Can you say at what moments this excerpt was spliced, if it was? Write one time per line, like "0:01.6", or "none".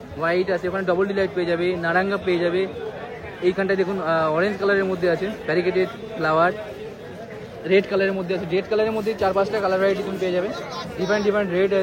none

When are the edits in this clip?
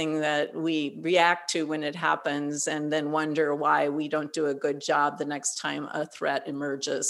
none

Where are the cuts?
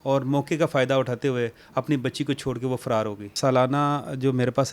0:03.3

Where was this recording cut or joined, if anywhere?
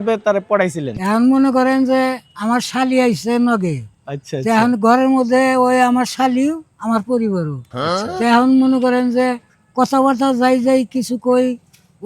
0:01.0

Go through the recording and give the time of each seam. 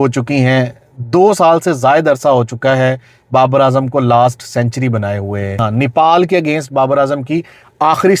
0:05.6

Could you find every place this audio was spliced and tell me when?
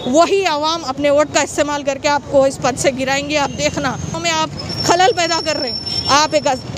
0:04.2

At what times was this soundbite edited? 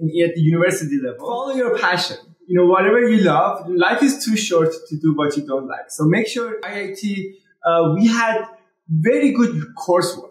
0:01.1
0:06.9

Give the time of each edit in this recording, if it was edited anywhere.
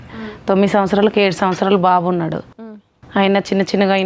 none

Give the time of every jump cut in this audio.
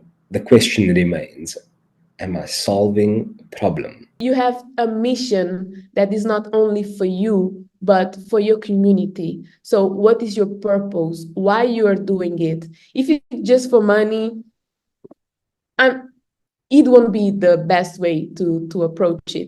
0:04.1

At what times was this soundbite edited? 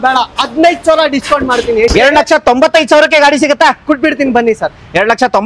none

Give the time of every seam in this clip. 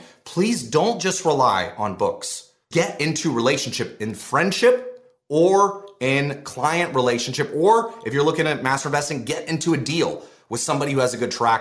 0:02.6

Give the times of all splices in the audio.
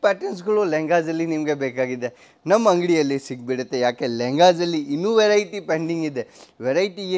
none

